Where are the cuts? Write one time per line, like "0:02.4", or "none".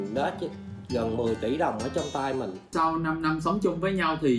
0:02.7